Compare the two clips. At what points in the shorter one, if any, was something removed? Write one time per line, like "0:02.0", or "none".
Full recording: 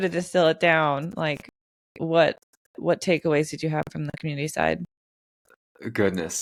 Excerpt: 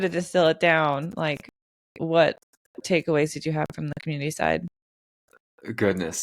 0:02.8

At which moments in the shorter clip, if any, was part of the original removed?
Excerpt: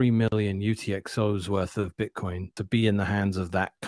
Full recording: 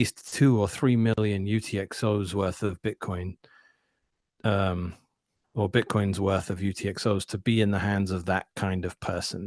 0:02.6

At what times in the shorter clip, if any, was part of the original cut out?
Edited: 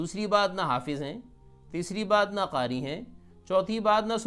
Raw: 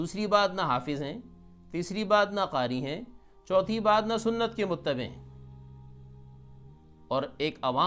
none

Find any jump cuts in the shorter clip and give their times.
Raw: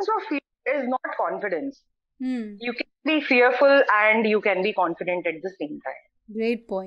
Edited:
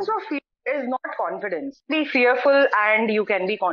0:01.8

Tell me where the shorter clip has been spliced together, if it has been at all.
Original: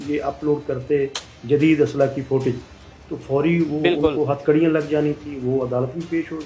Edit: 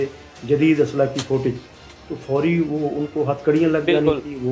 none

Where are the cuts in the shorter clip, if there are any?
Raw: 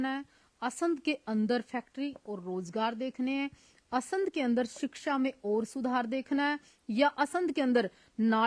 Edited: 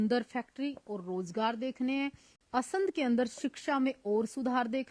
none

